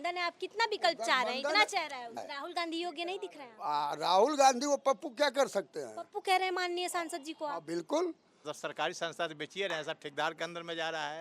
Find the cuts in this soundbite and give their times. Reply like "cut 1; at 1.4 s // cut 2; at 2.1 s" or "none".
cut 1; at 2.2 s // cut 2; at 8.5 s

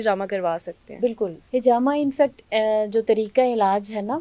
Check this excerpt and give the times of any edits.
cut 1; at 1.4 s

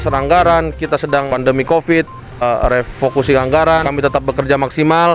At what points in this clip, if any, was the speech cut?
cut 1; at 1.3 s // cut 2; at 2.4 s // cut 3; at 3.9 s

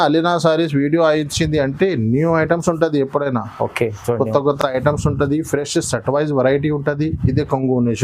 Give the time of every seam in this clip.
none

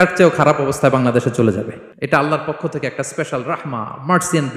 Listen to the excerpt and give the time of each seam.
cut 1; at 1.8 s

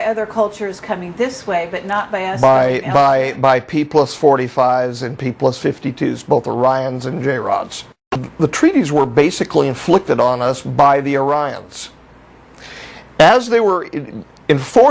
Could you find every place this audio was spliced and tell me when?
cut 1; at 8.2 s

